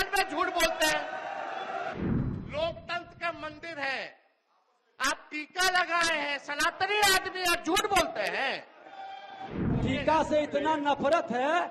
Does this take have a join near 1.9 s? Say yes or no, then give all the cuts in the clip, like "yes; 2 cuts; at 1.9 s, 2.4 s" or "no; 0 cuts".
yes; 2 cuts; at 1.9 s, 9.8 s